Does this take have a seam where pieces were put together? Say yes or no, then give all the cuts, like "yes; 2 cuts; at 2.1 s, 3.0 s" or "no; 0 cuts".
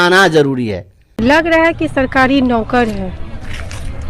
yes; 1 cut; at 1.3 s